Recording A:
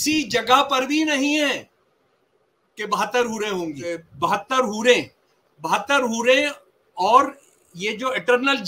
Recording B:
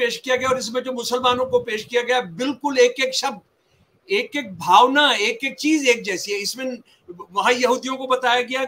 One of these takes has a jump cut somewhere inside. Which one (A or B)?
A